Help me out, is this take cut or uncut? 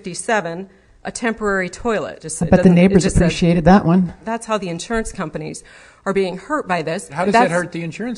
cut